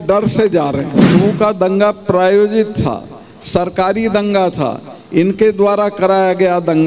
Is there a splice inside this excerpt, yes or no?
yes